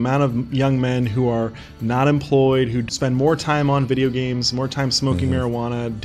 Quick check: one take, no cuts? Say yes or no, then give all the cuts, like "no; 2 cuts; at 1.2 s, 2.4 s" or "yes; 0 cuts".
no; 1 cut; at 2.9 s